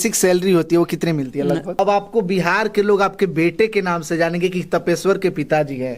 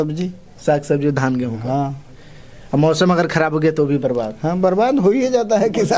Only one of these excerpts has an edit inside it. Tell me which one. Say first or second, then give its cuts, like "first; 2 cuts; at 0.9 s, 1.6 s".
first; 1 cut; at 1.8 s